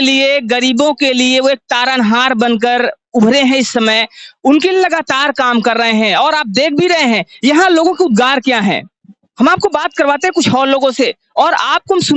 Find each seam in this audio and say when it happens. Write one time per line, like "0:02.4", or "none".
none